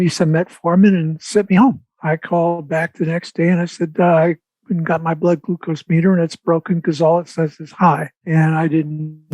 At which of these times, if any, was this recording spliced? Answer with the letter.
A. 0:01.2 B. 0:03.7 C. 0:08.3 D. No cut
C